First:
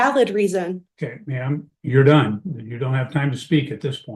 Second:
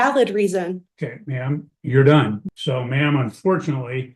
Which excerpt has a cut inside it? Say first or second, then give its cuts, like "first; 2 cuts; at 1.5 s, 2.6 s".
second; 1 cut; at 2.5 s